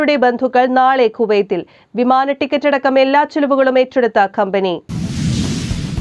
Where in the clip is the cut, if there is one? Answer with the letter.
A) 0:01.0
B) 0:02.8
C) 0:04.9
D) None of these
C